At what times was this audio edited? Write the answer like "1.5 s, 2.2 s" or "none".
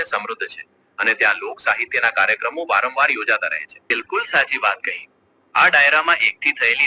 3.9 s